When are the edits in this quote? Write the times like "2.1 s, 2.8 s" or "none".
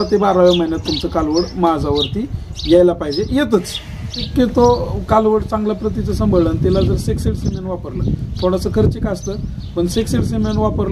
4.2 s